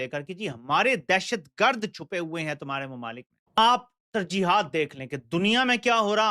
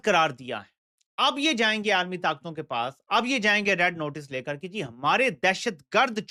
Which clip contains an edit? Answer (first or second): first